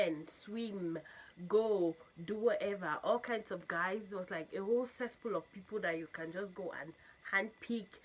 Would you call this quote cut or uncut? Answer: uncut